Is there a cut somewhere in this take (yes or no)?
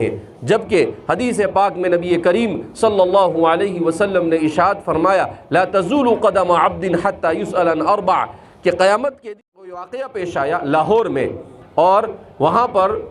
yes